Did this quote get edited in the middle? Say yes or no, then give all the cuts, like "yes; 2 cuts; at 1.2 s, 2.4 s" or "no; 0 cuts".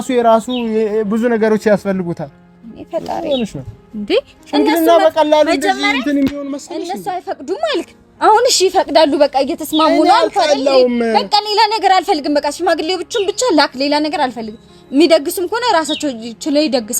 no; 0 cuts